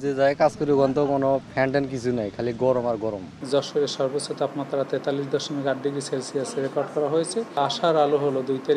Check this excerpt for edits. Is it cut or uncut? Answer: cut